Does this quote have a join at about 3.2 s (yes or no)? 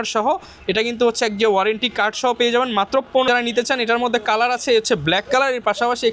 yes